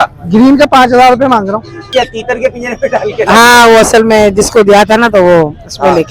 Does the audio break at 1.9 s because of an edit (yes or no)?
yes